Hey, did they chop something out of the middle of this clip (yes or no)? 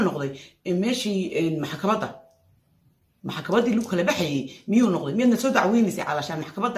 no